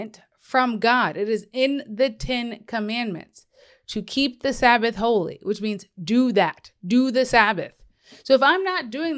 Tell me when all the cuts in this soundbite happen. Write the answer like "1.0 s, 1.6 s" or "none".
none